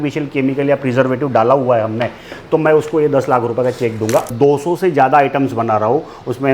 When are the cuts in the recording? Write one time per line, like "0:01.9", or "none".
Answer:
0:04.3